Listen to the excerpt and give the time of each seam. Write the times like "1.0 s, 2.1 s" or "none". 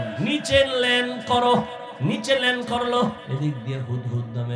1.8 s, 3.2 s